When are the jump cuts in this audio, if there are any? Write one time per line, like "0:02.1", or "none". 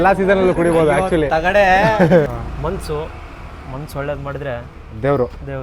0:02.3